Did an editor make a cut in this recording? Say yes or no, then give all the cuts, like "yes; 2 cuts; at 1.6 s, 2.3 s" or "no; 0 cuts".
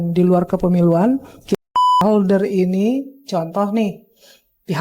yes; 1 cut; at 1.6 s